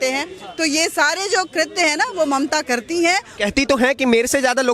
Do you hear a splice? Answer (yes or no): yes